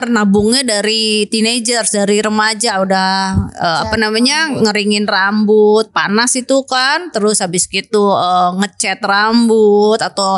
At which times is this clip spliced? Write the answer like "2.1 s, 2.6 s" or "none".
none